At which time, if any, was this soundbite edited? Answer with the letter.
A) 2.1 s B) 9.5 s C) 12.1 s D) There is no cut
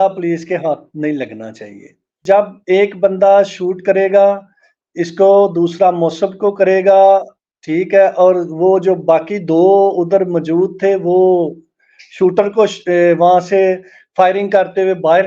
A